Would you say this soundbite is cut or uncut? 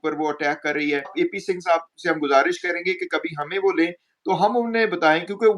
cut